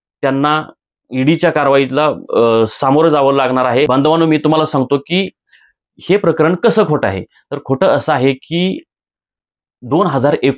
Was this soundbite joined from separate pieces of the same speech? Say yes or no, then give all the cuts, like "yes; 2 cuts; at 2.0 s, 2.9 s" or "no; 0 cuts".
no; 0 cuts